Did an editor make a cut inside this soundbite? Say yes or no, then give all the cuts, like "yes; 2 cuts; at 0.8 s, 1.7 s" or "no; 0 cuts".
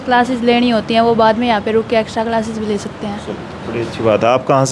no; 0 cuts